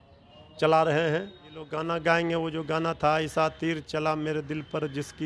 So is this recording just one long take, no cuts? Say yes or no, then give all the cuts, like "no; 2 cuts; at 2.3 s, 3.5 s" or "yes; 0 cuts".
no; 1 cut; at 1.8 s